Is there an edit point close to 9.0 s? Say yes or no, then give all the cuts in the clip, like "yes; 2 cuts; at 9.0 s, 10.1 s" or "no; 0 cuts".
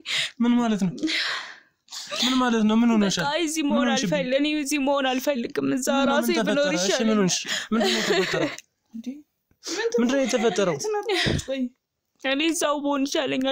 no; 0 cuts